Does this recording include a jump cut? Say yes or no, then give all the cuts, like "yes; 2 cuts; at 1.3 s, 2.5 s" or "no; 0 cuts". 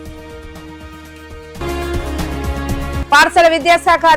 no; 0 cuts